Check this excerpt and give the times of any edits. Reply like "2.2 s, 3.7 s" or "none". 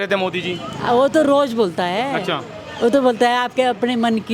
none